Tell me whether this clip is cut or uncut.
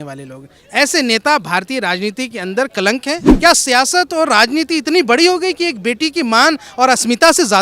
cut